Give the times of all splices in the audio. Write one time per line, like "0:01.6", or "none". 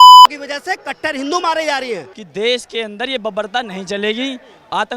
0:02.2